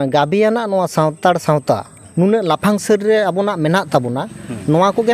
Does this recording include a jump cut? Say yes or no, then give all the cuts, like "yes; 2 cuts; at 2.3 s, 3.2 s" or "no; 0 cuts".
yes; 1 cut; at 2.2 s